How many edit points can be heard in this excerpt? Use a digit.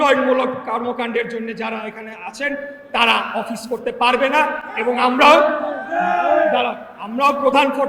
0